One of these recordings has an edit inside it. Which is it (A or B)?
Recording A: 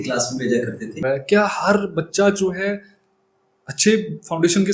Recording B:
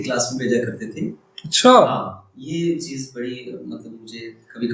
A